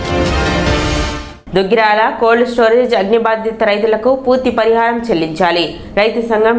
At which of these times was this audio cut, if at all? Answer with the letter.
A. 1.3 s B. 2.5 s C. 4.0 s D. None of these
A